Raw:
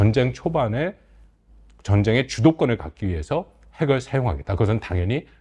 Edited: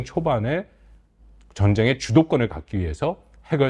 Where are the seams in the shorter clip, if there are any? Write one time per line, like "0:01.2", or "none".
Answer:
none